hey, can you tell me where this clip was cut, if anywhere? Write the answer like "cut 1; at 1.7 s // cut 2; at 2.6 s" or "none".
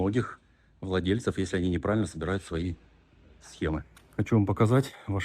cut 1; at 3.8 s